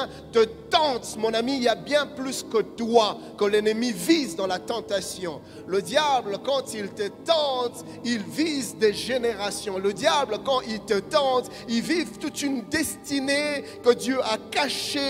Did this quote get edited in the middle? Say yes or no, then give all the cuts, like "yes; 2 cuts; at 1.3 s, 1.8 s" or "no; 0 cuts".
no; 0 cuts